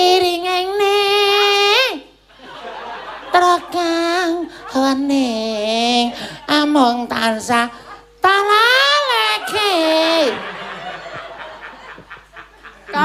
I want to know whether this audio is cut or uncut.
uncut